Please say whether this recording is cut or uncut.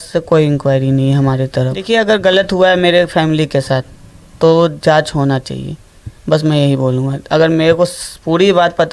uncut